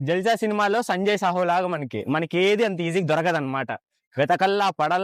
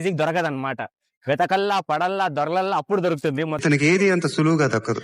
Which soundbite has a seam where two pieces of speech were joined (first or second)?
second